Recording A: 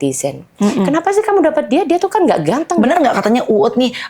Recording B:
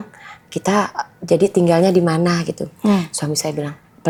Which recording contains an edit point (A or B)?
A